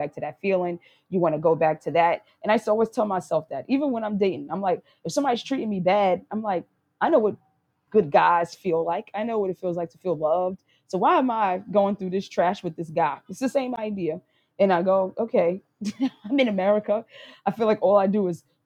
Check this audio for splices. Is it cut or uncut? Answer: uncut